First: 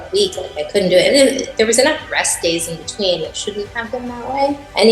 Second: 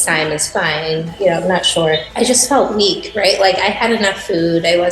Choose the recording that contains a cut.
second; 2 cuts; at 1.1 s, 2.0 s

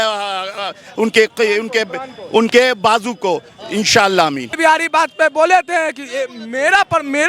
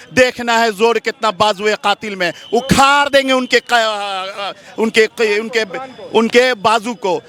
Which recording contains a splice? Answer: first; 1 cut; at 4.6 s

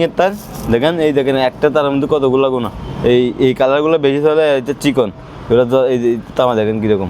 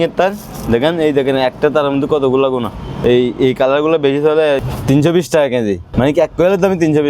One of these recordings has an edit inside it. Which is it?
second; 2 cuts; at 4.7 s, 5.8 s

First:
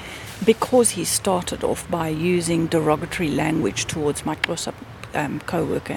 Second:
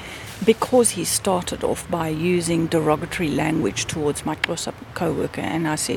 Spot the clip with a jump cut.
second; 1 cut; at 4.9 s

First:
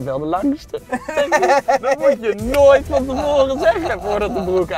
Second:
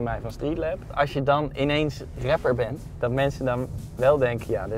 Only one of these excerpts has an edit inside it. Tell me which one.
second; 2 cuts; at 0.9 s, 2.8 s

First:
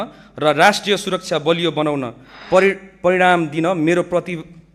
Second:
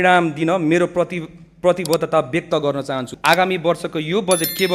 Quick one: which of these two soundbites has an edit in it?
second; 1 cut; at 3.1 s

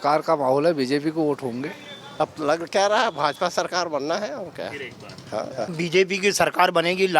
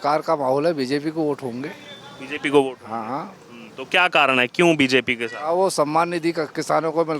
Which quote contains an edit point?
first; 2 cuts; at 2.2 s, 5.7 s

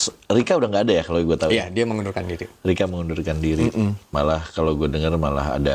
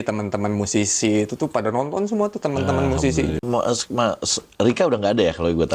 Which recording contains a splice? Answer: second; 1 cut; at 3.4 s

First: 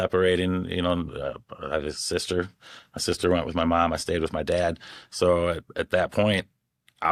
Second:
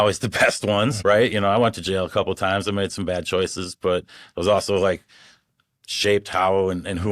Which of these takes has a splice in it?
second; 1 cut; at 1.0 s

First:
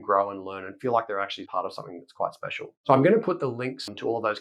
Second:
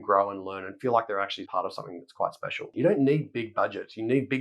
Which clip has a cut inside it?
second; 1 cut; at 2.7 s

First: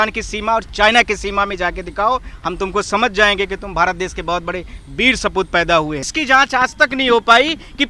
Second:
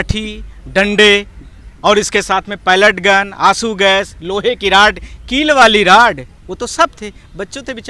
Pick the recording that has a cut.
first; 1 cut; at 6.1 s

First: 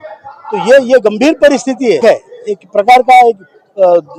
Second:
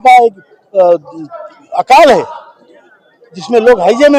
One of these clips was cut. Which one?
first; 1 cut; at 2.0 s

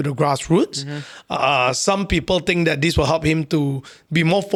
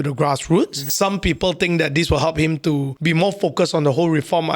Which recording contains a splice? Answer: second; 2 cuts; at 0.9 s, 2.9 s

